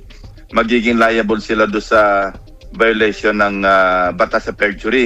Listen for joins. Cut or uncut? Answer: uncut